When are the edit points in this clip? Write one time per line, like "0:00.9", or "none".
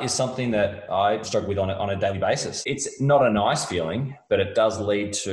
0:01.2
0:02.5